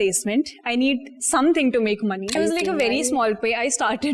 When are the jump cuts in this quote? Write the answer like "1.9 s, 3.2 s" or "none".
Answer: 2.3 s